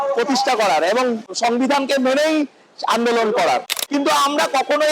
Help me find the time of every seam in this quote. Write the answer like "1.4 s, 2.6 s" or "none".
1.3 s, 3.7 s